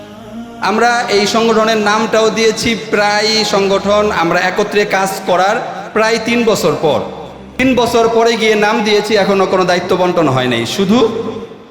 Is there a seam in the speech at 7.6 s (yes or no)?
yes